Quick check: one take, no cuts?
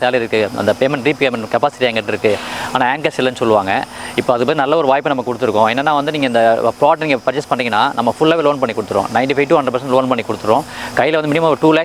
yes; 0 cuts

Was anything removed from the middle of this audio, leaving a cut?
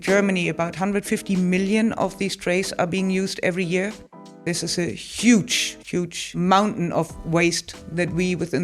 yes; 2 cuts; at 4.4 s, 6.3 s

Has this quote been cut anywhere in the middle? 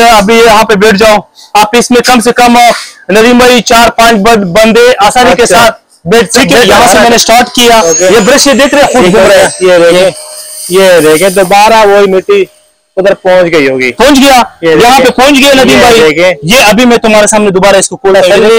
yes; 1 cut; at 6.7 s

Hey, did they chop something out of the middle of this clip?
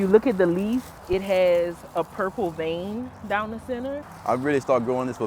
yes; 2 cuts; at 0.9 s, 4.1 s

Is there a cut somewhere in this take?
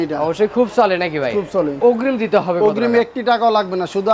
yes; 1 cut; at 1.8 s

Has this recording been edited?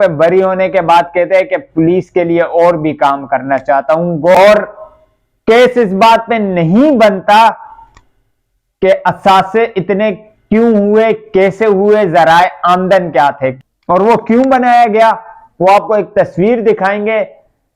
yes; 2 cuts; at 4.3 s, 13.6 s

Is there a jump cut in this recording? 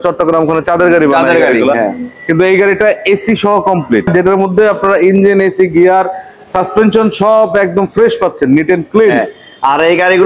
yes; 1 cut; at 4.1 s

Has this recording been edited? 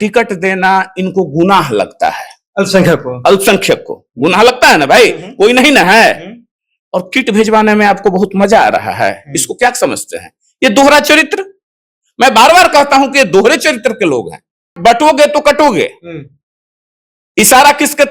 yes; 1 cut; at 14.7 s

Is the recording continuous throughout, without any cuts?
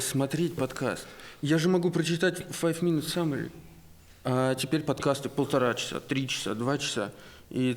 yes; 0 cuts

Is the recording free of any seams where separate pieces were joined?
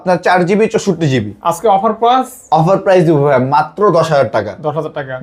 yes; 0 cuts

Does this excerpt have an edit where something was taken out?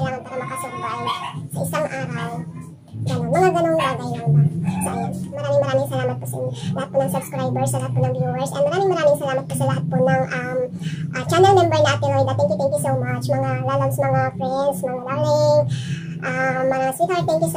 yes; 1 cut; at 5.4 s

